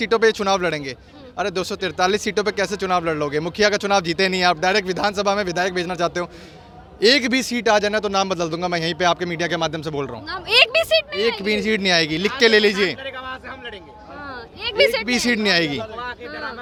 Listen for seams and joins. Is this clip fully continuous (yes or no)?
yes